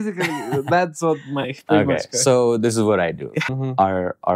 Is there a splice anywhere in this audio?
yes; 1 cut; at 3.3 s

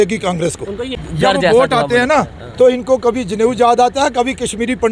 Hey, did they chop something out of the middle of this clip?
yes; 1 cut; at 1.0 s

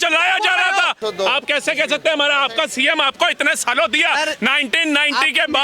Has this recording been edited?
yes; 1 cut; at 1.0 s

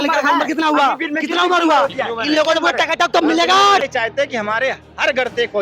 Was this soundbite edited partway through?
yes; 1 cut; at 3.8 s

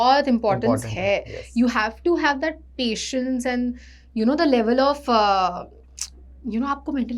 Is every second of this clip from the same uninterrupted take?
yes; 0 cuts

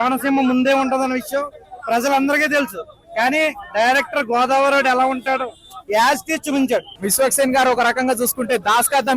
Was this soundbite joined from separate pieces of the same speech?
yes; 1 cut; at 7.0 s

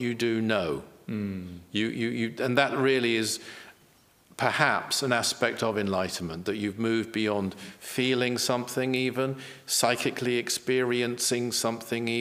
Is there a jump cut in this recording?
no; 0 cuts

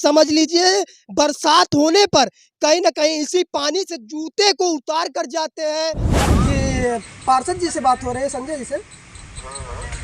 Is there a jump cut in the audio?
yes; 1 cut; at 6.2 s

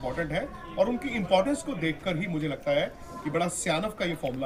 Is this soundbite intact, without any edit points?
yes; 0 cuts

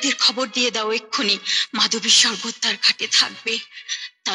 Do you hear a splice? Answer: no; 0 cuts

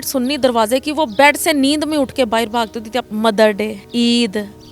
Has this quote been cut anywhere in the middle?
yes; 2 cuts; at 3.1 s, 3.8 s

